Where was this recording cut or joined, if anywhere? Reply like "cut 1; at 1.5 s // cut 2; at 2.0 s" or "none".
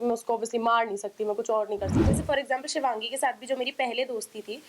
cut 1; at 2.0 s